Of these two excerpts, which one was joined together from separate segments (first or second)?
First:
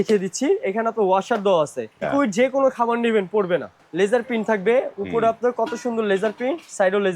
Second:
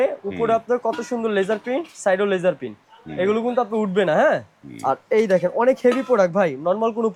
first